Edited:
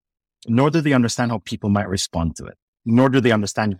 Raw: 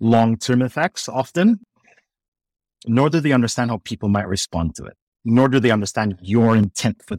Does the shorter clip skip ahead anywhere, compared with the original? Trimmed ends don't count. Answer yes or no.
no